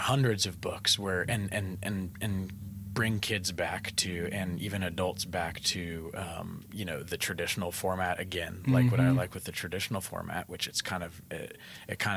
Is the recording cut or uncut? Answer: uncut